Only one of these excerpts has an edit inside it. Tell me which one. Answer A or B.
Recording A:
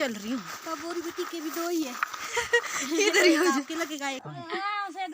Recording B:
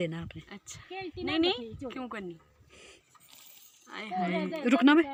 A